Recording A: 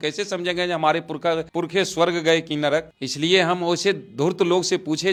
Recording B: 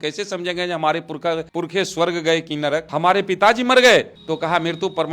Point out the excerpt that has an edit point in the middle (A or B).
B